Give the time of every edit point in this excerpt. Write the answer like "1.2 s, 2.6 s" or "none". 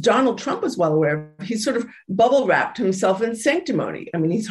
none